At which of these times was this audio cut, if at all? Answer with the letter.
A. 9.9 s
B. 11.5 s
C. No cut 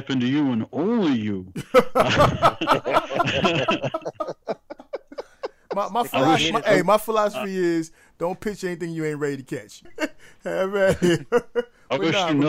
A